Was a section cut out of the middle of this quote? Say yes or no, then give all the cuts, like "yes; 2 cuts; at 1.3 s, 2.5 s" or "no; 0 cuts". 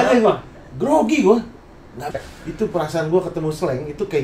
yes; 1 cut; at 2.0 s